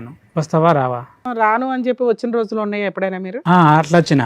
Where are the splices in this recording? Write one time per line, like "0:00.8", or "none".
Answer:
0:01.2